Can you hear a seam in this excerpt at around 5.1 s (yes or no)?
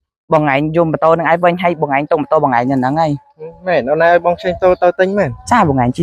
no